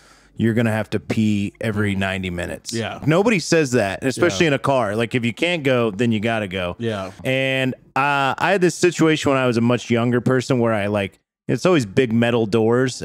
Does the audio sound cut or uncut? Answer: cut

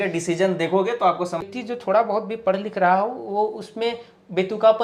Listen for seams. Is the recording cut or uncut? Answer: cut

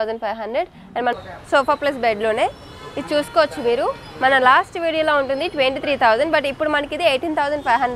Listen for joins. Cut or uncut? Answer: cut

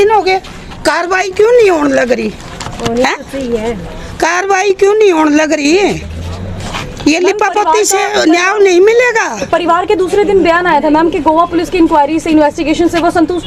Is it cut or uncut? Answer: uncut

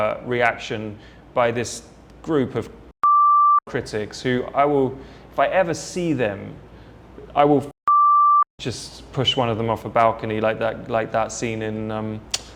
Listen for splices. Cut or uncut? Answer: uncut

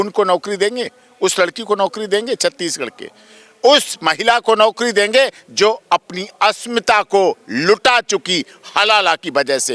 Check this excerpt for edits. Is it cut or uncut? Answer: uncut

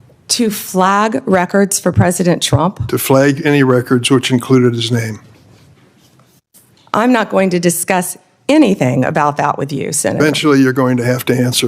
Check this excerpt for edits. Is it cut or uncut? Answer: uncut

